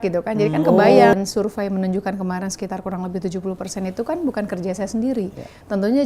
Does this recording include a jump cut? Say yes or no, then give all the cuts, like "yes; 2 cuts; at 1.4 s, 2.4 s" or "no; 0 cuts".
yes; 1 cut; at 1.1 s